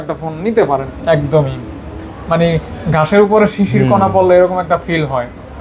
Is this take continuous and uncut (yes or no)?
no